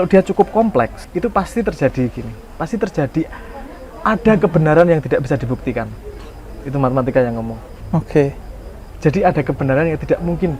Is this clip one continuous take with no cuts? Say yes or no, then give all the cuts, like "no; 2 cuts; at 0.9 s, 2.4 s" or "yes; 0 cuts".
no; 1 cut; at 1.0 s